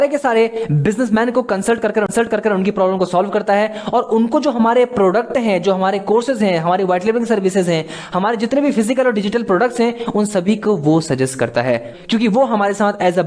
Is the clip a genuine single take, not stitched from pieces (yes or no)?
no